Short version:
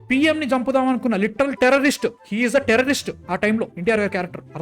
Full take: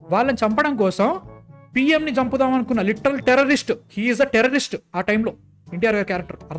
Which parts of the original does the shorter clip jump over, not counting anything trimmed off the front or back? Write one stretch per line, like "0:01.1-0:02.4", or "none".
0:05.4-0:05.7